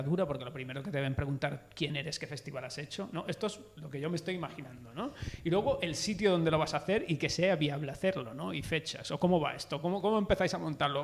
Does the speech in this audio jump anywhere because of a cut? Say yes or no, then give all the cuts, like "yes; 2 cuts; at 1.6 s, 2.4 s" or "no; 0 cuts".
no; 0 cuts